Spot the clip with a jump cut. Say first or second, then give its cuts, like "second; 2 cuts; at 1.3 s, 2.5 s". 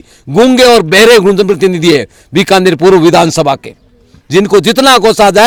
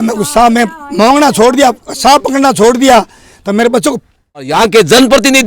second; 1 cut; at 4.4 s